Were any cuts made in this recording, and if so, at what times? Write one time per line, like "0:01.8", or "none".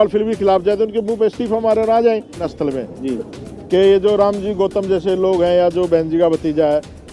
0:02.5